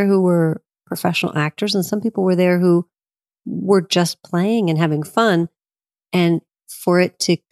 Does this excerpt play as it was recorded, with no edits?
yes; 0 cuts

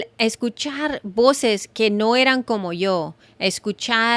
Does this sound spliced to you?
no; 0 cuts

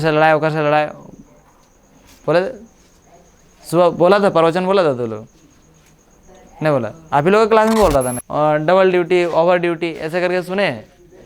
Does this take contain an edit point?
yes; 1 cut; at 8.2 s

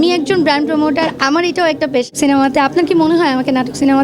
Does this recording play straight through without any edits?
no; 1 cut; at 2.1 s

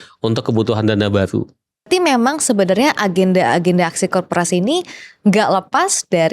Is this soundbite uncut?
no; 1 cut; at 1.9 s

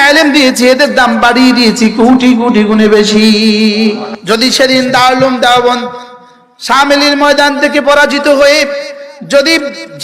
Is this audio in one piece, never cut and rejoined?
no; 1 cut; at 4.1 s

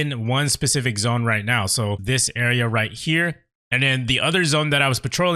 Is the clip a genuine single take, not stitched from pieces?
no; 1 cut; at 2.0 s

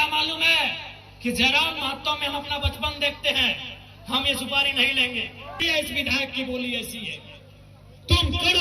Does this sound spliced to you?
yes; 1 cut; at 5.6 s

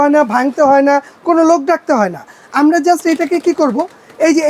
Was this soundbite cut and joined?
no; 0 cuts

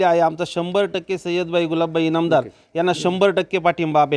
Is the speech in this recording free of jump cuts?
yes; 0 cuts

